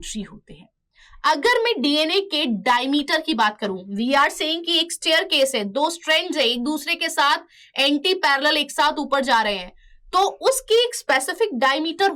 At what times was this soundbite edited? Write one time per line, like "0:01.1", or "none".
none